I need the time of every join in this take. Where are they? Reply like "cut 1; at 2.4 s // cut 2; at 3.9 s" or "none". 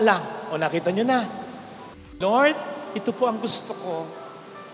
cut 1; at 2.1 s

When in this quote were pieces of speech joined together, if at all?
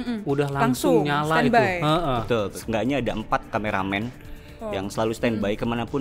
cut 1; at 2.6 s

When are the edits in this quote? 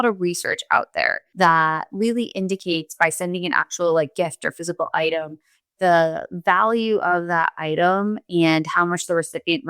cut 1; at 1.2 s

